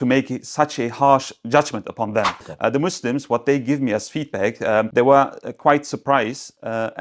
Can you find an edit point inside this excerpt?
yes; 2 cuts; at 2.4 s, 4.9 s

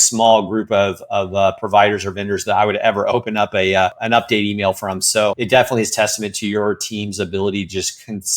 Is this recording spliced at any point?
yes; 2 cuts; at 4.0 s, 5.4 s

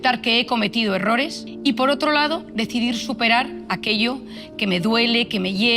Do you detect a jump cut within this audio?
yes; 1 cut; at 1.5 s

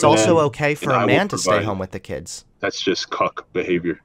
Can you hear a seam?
yes; 1 cut; at 2.4 s

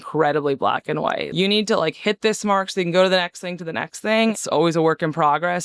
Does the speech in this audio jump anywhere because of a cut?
yes; 2 cuts; at 1.3 s, 4.4 s

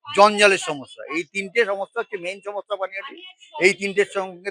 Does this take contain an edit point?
no; 0 cuts

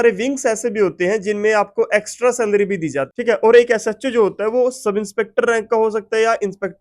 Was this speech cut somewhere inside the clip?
yes; 1 cut; at 3.1 s

